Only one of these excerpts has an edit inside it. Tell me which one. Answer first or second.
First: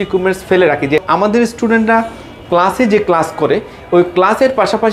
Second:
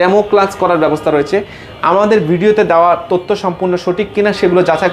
first